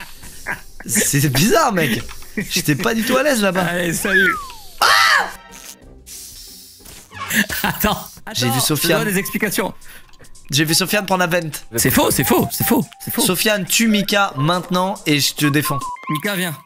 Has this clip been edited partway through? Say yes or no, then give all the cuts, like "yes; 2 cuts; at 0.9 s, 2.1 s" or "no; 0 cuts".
yes; 2 cuts; at 2.2 s, 11.6 s